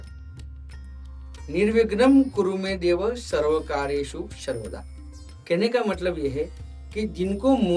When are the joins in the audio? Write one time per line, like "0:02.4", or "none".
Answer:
none